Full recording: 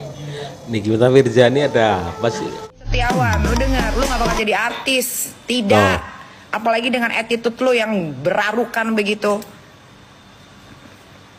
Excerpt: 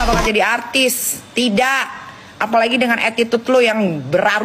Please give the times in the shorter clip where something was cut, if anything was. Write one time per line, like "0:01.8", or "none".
none